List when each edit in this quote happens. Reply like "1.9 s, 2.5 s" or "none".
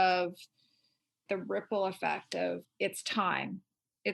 1.2 s, 2.6 s